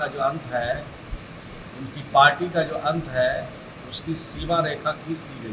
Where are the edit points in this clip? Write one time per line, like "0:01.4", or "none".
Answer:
none